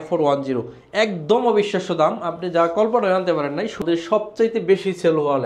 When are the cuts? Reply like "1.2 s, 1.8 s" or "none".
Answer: 3.8 s